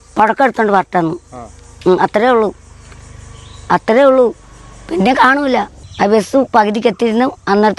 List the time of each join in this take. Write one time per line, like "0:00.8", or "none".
0:05.8